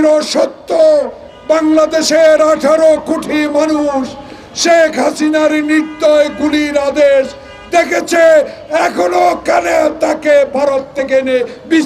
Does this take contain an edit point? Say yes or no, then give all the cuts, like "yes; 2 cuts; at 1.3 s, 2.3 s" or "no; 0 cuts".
no; 0 cuts